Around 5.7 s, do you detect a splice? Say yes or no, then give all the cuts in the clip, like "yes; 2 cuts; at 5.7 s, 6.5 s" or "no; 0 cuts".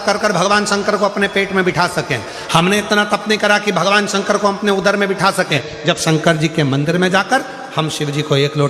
yes; 1 cut; at 5.7 s